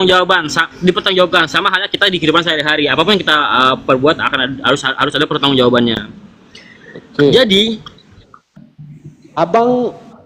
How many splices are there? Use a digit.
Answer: 1